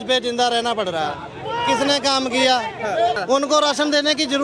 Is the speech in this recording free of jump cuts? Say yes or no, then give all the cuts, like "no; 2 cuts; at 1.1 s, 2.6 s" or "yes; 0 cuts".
no; 1 cut; at 3.2 s